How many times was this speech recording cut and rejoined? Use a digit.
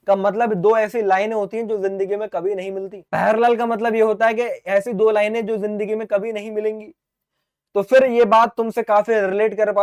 1